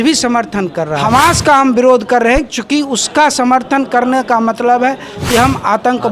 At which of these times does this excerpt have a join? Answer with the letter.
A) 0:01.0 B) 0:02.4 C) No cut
A